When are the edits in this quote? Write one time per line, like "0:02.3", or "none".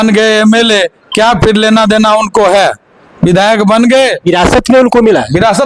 none